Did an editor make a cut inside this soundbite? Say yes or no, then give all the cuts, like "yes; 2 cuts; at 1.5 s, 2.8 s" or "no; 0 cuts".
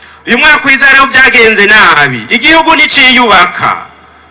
no; 0 cuts